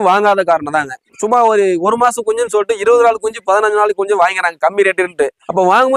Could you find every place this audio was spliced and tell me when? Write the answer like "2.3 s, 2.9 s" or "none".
none